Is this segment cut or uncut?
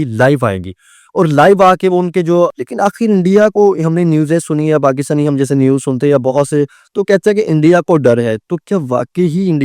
cut